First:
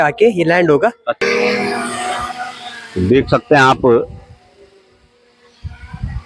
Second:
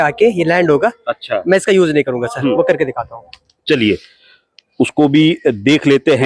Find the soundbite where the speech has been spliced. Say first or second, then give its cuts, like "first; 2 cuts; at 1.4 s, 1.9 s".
first; 1 cut; at 1.2 s